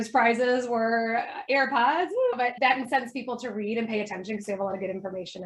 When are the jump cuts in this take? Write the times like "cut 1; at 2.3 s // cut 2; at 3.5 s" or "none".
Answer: none